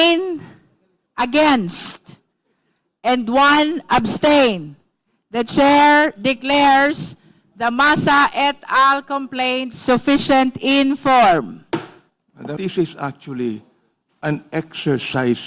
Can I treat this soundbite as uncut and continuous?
no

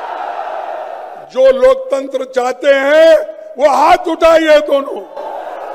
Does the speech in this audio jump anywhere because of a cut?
no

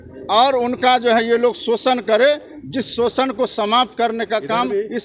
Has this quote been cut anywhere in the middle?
no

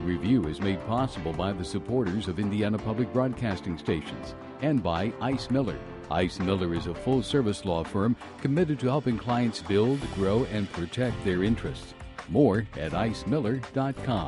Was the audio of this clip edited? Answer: no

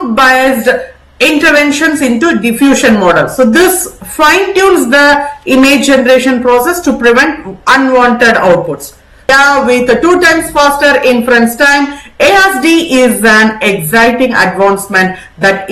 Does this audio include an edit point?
yes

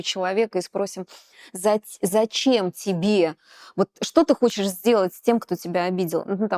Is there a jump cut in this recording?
no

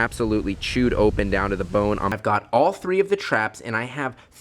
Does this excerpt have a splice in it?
yes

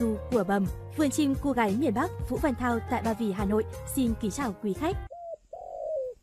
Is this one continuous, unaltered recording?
no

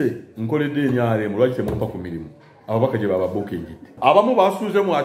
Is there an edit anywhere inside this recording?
yes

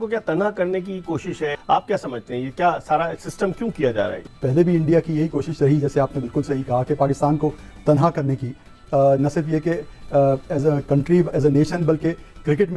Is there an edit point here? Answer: no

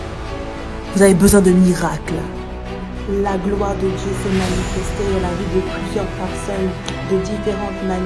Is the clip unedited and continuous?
no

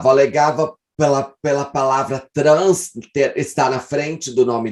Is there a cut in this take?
no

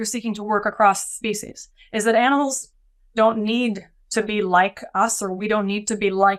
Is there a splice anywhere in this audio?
no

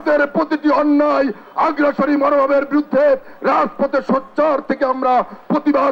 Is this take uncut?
yes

